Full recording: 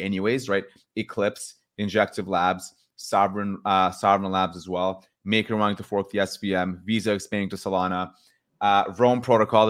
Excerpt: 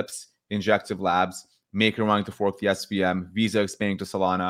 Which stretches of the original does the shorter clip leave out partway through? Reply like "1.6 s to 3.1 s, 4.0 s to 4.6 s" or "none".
2.9 s to 5.1 s